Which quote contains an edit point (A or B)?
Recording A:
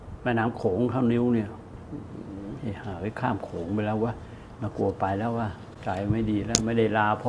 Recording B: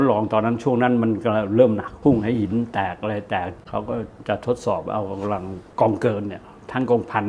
B